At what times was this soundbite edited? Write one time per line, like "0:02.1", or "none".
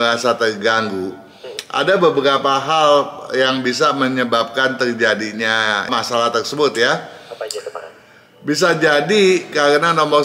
none

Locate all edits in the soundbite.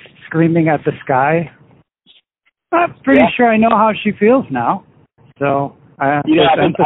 none

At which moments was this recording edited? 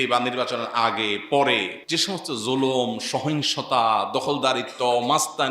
0:01.8

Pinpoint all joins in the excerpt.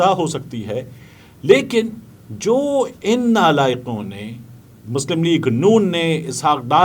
none

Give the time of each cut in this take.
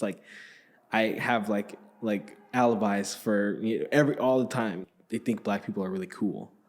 0:04.8

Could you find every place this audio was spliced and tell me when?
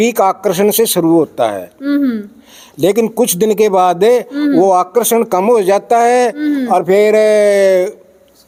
none

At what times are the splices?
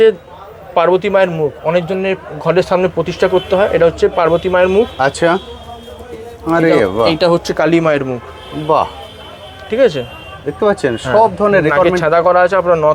none

